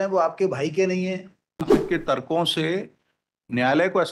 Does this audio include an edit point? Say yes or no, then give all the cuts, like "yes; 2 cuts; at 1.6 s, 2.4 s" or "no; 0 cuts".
yes; 1 cut; at 1.8 s